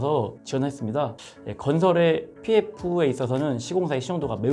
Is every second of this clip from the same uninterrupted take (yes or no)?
yes